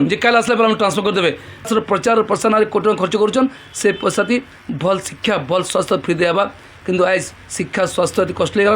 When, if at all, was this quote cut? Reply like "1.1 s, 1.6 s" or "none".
1.7 s